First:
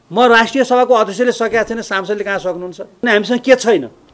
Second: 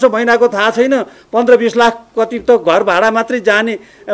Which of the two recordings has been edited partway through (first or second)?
first